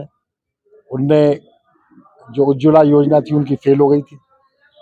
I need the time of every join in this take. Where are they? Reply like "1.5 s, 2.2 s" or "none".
none